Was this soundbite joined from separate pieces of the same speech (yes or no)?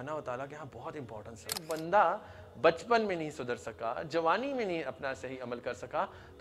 yes